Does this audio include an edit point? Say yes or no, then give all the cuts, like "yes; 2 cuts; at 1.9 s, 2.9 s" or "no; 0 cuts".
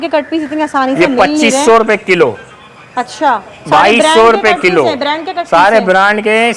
no; 0 cuts